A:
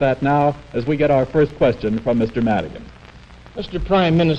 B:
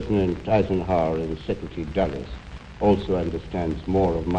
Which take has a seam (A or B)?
B